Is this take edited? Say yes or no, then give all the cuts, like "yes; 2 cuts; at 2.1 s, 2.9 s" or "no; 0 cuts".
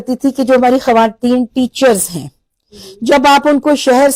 no; 0 cuts